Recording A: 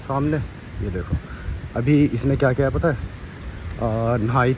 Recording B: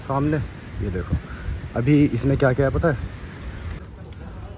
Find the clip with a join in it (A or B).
B